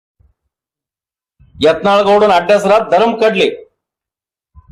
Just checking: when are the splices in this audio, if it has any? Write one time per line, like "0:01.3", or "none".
none